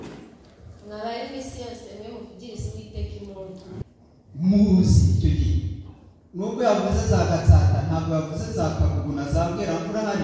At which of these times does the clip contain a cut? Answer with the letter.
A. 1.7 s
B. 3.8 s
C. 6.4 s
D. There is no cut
B